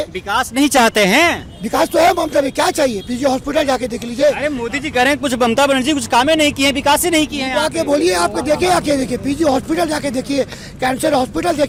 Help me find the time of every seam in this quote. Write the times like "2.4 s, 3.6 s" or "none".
none